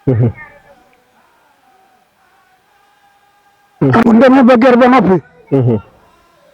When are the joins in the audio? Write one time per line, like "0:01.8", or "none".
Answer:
0:04.0